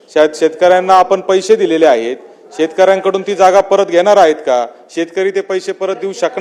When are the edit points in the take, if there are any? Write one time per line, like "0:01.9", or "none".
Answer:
none